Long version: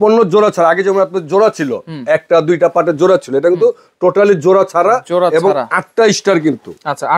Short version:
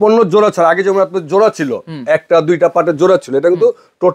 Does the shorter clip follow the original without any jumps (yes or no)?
yes